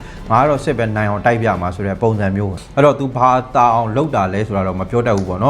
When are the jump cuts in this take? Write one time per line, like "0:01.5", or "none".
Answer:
0:02.6